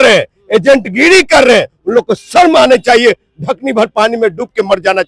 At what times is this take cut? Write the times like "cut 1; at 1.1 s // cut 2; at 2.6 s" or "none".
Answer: none